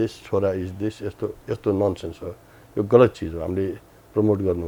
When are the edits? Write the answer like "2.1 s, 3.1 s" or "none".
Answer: none